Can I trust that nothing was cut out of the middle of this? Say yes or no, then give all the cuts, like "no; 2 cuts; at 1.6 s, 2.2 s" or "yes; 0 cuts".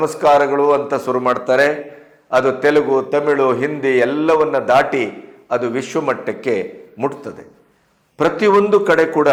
yes; 0 cuts